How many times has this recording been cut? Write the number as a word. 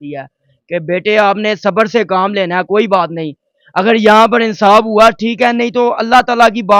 zero